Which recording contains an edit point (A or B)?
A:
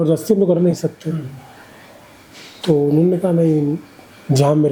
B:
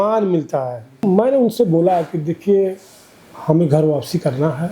B